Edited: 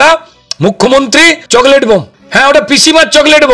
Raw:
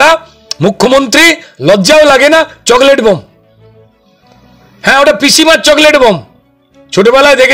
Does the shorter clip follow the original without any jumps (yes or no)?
no